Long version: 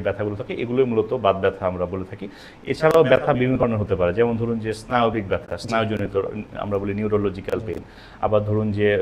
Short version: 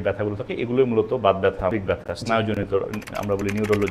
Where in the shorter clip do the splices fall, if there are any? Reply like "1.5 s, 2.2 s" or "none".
1.7 s